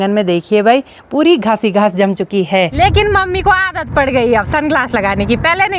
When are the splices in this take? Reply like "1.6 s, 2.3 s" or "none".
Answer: 2.7 s

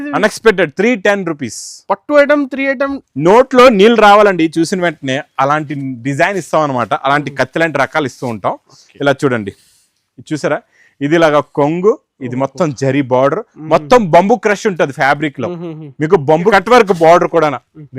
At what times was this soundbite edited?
3.0 s, 16.5 s

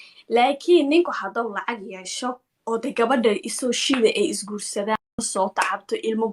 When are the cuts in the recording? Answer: 5.3 s

